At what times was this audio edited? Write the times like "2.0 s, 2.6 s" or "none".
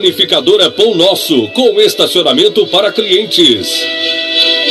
3.7 s